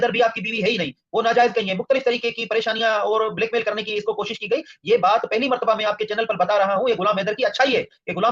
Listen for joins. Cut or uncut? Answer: uncut